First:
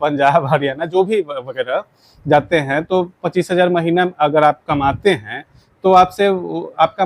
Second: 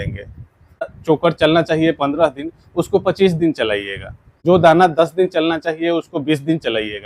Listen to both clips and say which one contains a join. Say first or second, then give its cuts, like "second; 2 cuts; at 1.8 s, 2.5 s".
second; 2 cuts; at 0.9 s, 4.4 s